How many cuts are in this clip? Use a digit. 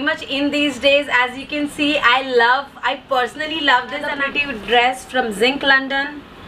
1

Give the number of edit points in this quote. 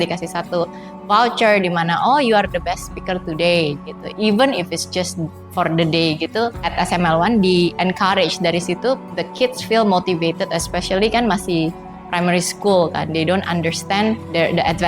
1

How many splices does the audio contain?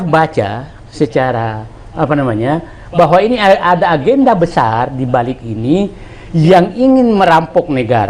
0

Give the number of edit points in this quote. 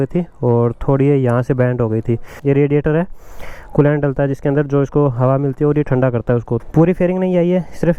2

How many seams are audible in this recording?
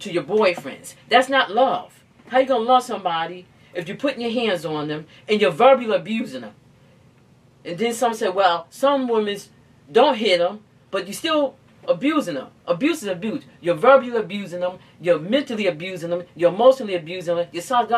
0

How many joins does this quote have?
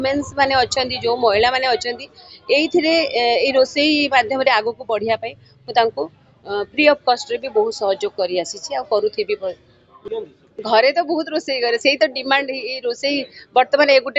1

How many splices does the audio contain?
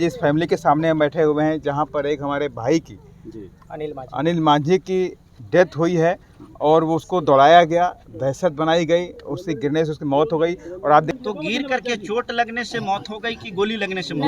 1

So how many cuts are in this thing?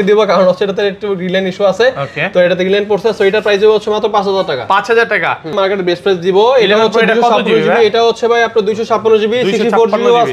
1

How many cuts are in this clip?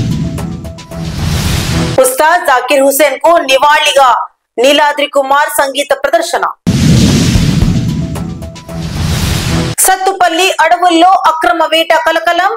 1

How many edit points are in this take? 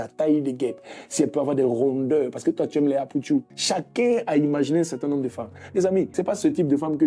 2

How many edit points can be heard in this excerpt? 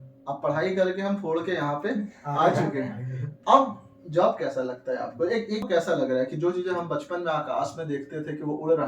1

